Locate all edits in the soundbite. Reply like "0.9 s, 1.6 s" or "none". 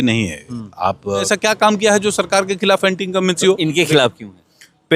1.3 s